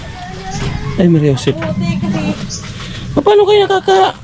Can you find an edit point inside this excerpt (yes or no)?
no